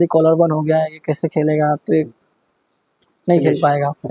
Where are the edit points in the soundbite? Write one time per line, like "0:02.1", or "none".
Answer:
none